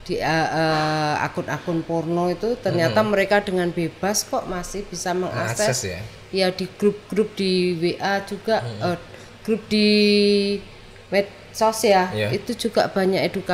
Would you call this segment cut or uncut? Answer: uncut